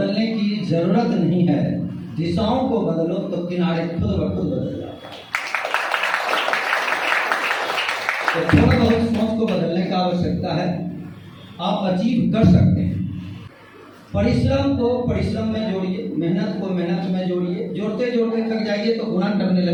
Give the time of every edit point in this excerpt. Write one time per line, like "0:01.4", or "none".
none